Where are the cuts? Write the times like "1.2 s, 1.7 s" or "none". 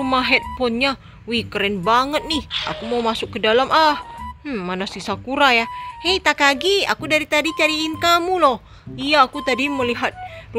none